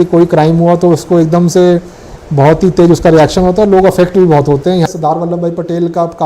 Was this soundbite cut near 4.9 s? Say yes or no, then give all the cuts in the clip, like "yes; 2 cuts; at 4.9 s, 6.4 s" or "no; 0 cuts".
yes; 1 cut; at 4.9 s